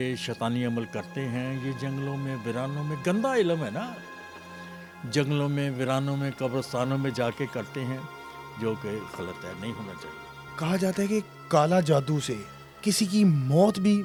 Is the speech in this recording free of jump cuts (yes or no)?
yes